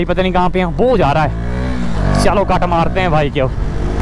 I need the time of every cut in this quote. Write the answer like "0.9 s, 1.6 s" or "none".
none